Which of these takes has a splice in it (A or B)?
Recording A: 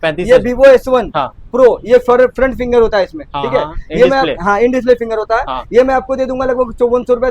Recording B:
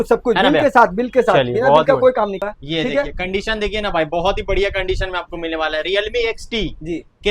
B